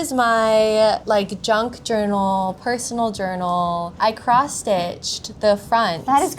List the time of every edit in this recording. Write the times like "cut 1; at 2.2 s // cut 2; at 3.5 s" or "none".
cut 1; at 1.0 s // cut 2; at 3.9 s